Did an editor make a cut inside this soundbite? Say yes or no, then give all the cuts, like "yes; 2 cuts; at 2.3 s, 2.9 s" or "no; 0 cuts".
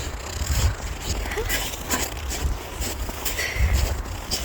yes; 1 cut; at 1.1 s